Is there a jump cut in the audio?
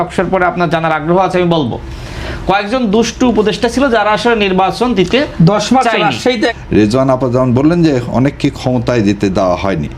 yes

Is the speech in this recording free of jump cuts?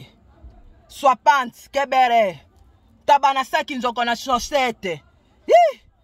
yes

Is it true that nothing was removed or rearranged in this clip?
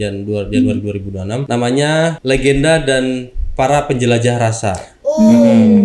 no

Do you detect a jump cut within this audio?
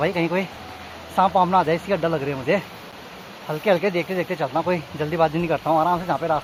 no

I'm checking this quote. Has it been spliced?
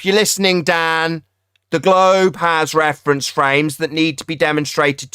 no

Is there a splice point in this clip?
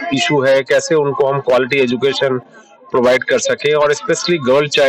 no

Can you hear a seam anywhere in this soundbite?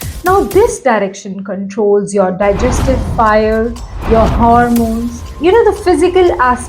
yes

